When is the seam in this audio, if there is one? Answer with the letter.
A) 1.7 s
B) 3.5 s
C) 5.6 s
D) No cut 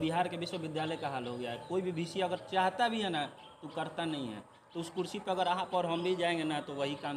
D